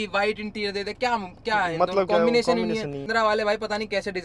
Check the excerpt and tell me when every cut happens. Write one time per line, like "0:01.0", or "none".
0:03.1